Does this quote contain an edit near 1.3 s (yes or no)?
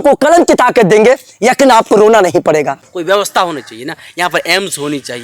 no